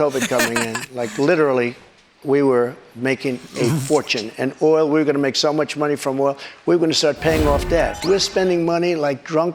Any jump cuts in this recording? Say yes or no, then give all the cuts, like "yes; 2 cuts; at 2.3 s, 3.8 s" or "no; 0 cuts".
yes; 1 cut; at 8.0 s